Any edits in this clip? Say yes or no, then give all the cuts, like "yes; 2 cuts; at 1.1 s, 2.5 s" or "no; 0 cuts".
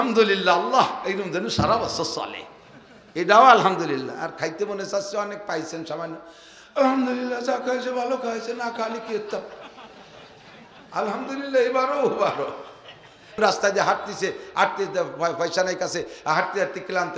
yes; 1 cut; at 13.4 s